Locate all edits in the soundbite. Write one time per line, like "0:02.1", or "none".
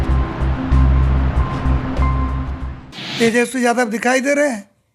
0:02.8